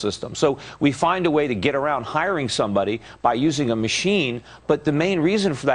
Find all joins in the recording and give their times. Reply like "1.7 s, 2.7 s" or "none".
3.5 s